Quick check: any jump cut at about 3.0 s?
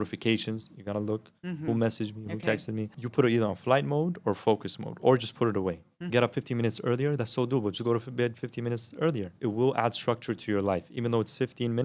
yes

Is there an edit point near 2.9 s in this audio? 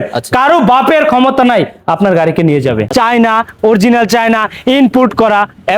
yes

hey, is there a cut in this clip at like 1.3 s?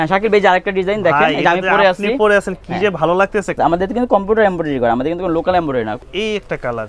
no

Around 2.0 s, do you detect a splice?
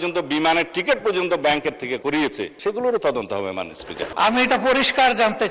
yes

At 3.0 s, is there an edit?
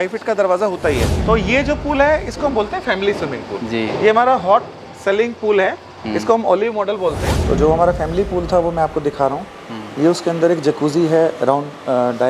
no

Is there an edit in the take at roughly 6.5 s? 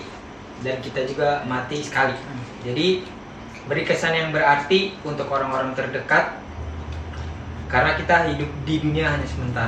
no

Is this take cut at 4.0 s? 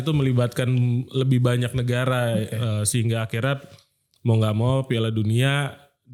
no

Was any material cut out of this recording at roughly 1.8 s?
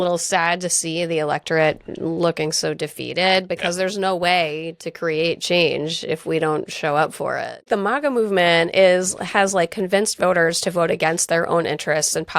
no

